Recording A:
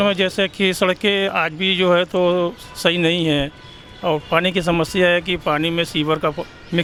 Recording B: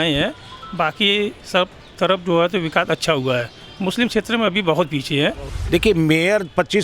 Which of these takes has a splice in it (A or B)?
B